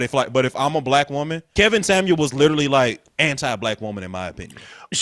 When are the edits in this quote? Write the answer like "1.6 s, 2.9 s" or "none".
1.4 s, 3.0 s